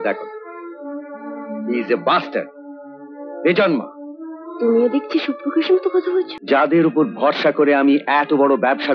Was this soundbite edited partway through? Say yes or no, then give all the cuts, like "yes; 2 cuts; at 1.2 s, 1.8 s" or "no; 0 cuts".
yes; 1 cut; at 6.4 s